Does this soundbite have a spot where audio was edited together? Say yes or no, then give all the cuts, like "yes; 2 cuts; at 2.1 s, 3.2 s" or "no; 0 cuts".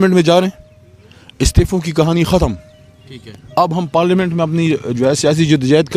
no; 0 cuts